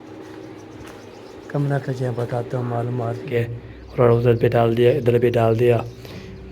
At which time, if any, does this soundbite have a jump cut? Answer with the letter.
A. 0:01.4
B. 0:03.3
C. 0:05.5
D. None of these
B